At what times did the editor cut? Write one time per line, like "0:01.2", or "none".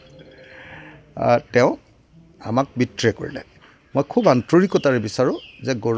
0:03.6